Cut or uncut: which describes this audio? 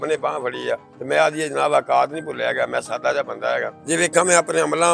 cut